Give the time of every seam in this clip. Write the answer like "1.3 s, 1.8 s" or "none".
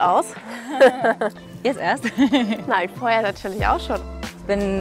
1.3 s, 4.0 s